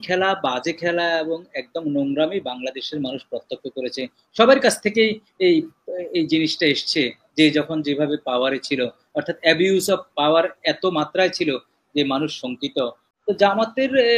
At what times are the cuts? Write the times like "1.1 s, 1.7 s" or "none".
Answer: 13.1 s